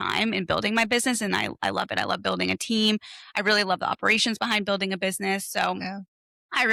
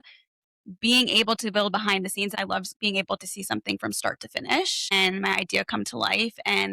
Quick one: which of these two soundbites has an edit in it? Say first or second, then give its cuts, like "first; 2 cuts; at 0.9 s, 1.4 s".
second; 1 cut; at 2.3 s